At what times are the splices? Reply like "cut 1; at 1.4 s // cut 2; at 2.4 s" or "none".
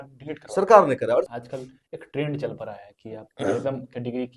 cut 1; at 1.3 s